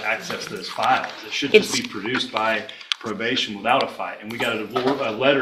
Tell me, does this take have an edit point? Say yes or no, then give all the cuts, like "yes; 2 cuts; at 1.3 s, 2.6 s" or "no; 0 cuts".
no; 0 cuts